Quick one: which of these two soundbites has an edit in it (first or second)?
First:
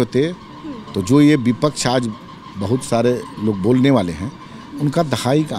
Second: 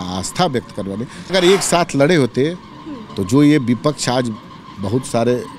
second